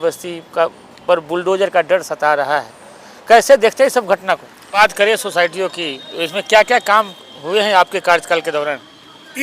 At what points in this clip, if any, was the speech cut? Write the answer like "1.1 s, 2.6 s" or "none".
4.7 s